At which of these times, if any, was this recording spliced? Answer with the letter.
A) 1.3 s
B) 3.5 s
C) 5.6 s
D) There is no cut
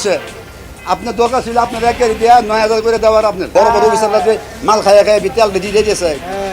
B